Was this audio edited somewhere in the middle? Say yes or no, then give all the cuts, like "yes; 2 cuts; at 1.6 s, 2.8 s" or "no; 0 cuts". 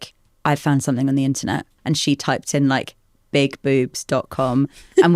yes; 1 cut; at 1.7 s